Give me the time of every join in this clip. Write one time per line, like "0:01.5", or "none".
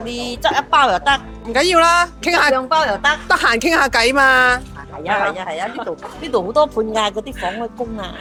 none